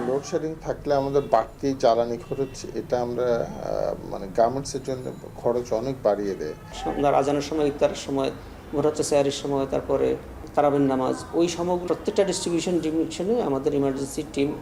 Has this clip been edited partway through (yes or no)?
yes